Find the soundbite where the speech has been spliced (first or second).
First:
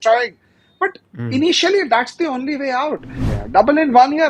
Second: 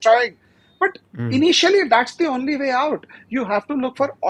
first